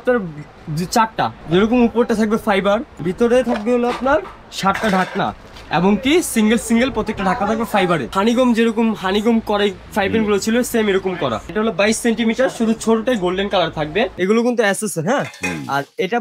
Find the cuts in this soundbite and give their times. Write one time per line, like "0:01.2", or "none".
0:01.4
0:02.9
0:08.1
0:11.5
0:14.1